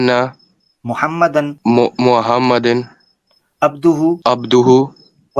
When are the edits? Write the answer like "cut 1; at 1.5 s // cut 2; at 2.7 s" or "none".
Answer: cut 1; at 1.5 s // cut 2; at 4.2 s